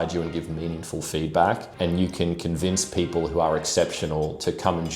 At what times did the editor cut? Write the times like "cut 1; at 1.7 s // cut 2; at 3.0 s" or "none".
cut 1; at 1.7 s